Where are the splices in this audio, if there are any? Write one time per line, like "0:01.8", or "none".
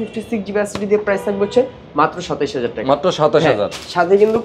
none